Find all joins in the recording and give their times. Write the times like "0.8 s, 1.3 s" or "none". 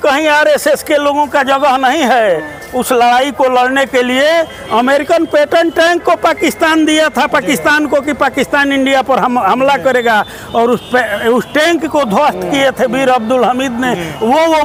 none